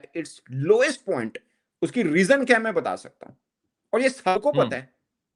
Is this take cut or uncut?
uncut